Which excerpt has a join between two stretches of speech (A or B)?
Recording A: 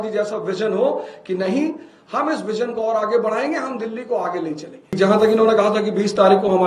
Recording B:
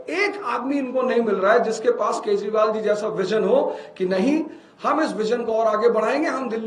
A